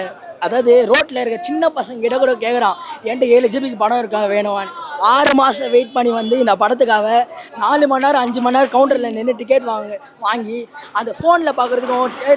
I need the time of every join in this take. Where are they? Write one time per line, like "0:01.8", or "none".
none